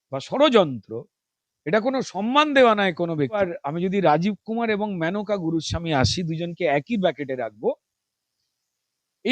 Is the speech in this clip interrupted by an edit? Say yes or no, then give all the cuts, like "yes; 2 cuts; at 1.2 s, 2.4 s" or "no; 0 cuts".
yes; 1 cut; at 3.4 s